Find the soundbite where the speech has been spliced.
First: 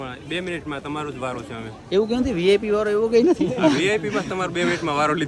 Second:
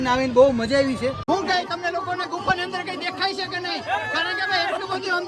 second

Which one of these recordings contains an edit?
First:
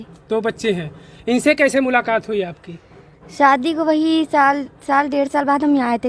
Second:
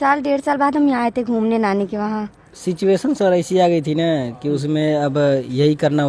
second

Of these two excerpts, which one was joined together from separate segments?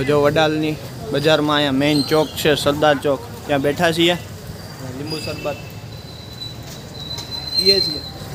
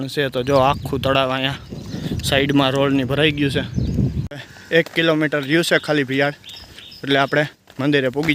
second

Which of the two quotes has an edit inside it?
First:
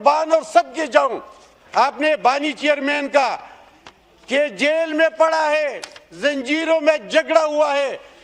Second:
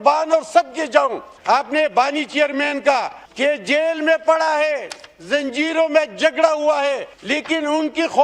second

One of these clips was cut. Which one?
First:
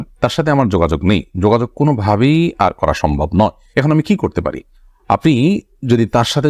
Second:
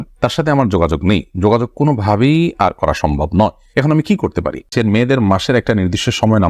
second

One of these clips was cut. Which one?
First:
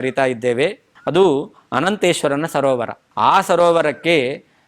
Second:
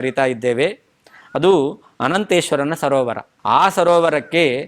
first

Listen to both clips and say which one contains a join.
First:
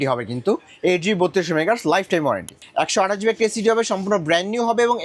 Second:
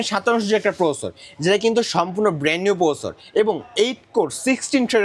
first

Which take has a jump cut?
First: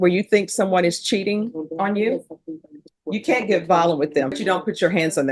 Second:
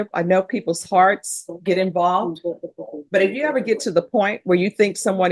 first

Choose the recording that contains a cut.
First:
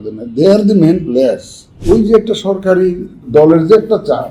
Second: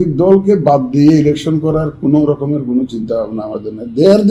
first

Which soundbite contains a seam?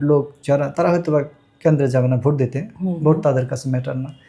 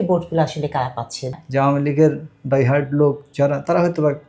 second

